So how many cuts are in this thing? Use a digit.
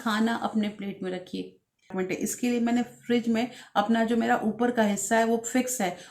1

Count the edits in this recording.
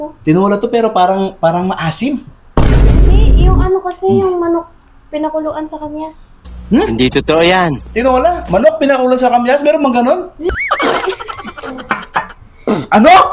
1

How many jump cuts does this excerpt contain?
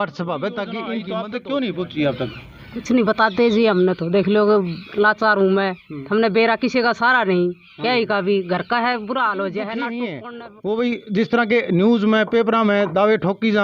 2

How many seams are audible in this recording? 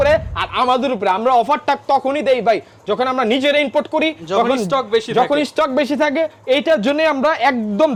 0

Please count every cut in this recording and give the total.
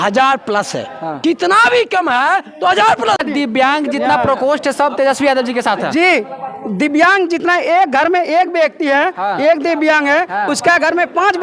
1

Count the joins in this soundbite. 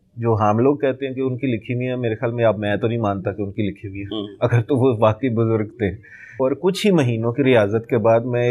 1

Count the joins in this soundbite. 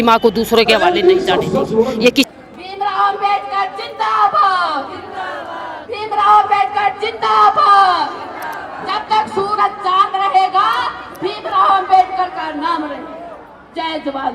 1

